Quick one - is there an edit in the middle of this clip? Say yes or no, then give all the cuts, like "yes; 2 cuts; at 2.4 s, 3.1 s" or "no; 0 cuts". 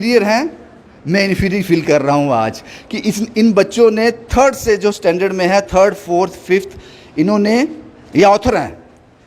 no; 0 cuts